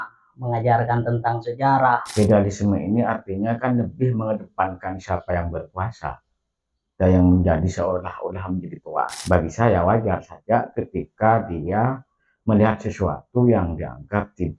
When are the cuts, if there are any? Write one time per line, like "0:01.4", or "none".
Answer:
0:02.1
0:09.2

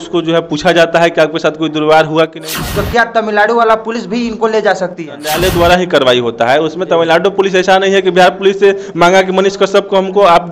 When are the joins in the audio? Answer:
0:02.5
0:05.3

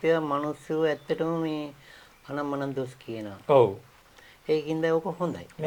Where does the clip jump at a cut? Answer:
none

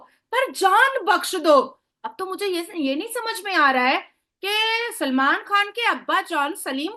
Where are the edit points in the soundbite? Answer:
none

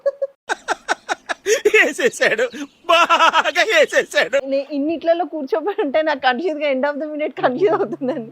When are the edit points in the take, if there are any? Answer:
0:04.5

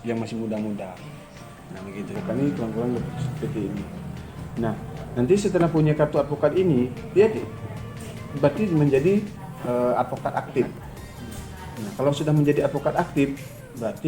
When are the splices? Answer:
0:02.2

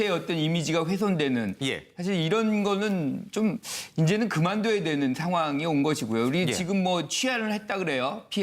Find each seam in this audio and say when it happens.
0:05.8

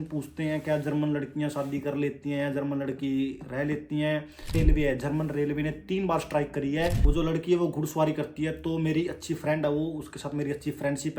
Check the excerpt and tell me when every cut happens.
0:04.6
0:07.0

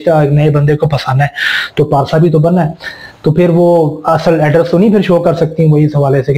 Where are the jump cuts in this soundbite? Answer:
none

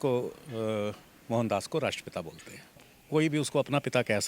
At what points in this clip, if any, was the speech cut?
0:02.9

